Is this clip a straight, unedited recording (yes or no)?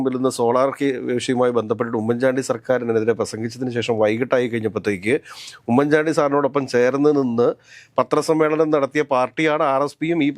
yes